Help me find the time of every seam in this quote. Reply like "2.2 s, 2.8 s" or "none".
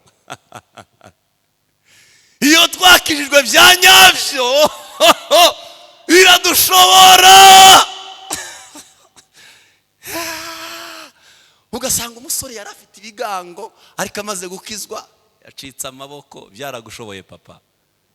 none